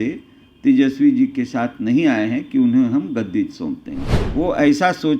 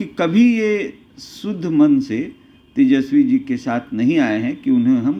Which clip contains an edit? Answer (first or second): first